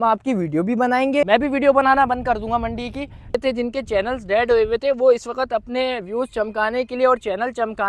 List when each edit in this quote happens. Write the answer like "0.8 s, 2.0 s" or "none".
1.2 s, 3.4 s